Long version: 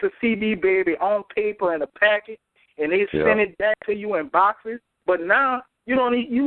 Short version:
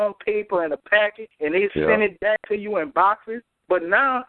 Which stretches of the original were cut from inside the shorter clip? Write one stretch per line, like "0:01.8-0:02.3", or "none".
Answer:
0:02.4-0:02.6